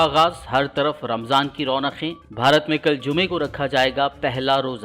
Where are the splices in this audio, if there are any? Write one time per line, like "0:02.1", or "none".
none